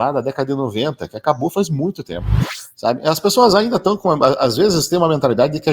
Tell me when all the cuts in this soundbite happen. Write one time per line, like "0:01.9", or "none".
0:02.3